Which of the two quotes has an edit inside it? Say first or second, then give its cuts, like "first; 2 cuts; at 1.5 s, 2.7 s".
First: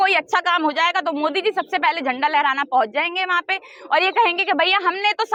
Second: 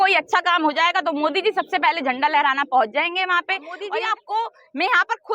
second; 1 cut; at 3.7 s